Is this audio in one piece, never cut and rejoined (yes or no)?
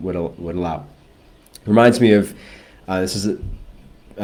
yes